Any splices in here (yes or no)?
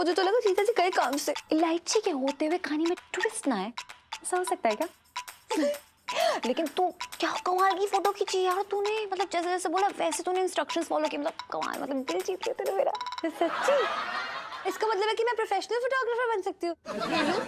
yes